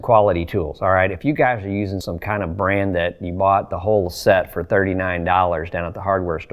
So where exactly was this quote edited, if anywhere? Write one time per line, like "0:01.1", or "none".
0:02.0